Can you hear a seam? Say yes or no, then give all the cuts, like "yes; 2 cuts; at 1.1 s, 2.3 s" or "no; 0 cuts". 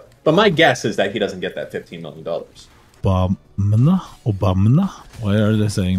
yes; 1 cut; at 3.0 s